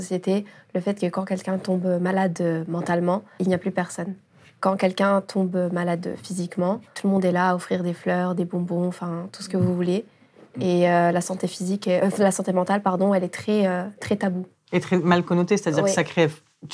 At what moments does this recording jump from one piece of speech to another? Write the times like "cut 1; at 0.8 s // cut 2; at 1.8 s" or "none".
none